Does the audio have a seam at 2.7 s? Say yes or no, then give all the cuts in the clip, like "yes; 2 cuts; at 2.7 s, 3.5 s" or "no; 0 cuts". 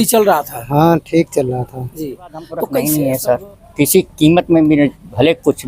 yes; 1 cut; at 2.7 s